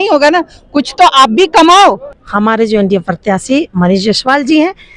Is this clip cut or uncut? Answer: cut